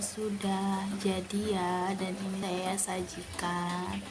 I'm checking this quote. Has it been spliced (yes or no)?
no